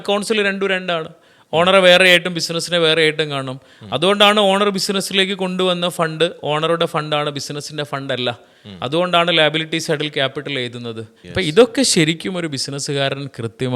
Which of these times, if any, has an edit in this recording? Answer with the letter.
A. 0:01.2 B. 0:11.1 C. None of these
B